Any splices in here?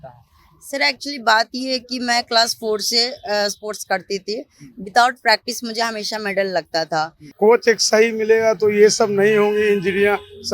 yes; 1 cut; at 7.2 s

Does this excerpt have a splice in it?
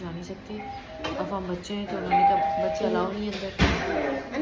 no; 0 cuts

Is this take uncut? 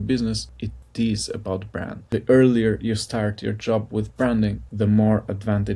no; 1 cut; at 2.0 s

